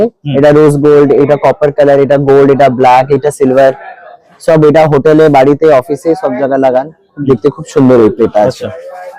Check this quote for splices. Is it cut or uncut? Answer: uncut